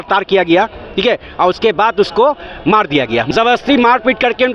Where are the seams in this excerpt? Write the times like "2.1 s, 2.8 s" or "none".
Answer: 3.3 s